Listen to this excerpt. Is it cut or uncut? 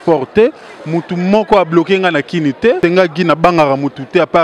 cut